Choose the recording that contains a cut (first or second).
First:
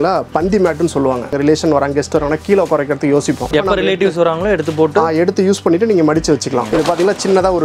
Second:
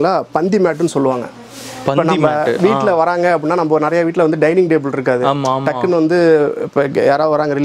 first